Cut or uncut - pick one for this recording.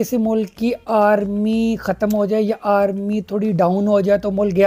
uncut